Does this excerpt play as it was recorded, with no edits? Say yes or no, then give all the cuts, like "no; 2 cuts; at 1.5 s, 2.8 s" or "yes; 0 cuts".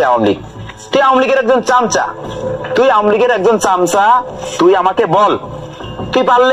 no; 1 cut; at 4.4 s